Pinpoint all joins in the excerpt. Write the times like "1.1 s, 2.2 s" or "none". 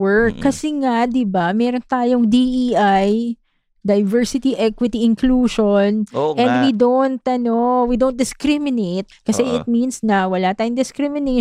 9.1 s